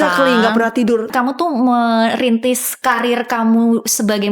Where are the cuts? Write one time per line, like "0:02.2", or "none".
0:01.1
0:02.7